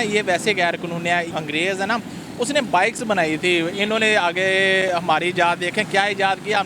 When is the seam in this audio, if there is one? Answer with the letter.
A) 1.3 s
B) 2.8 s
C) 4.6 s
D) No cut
A